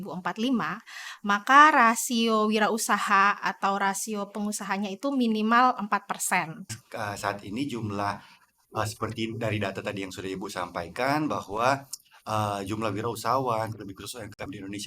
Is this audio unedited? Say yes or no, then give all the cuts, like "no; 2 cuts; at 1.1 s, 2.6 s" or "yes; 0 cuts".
no; 1 cut; at 6.8 s